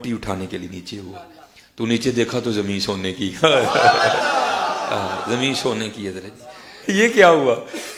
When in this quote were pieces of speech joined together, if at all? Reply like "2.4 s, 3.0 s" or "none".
none